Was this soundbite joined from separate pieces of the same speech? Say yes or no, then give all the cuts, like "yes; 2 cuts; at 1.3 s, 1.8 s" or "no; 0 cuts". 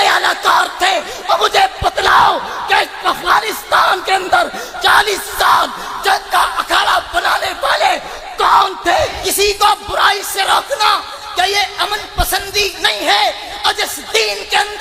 yes; 1 cut; at 9.2 s